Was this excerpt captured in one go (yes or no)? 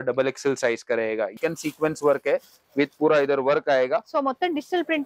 no